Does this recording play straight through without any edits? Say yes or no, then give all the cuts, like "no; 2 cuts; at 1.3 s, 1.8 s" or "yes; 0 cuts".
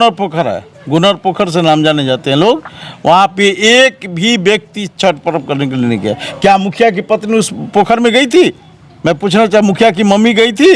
yes; 0 cuts